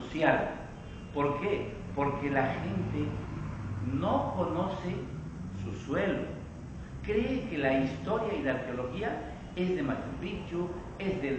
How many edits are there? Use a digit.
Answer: 0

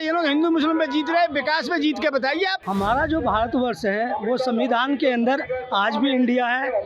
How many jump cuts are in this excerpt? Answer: 1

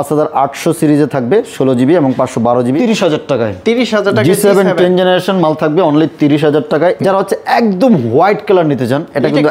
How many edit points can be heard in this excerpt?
2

